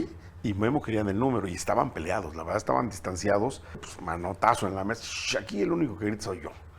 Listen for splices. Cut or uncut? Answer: cut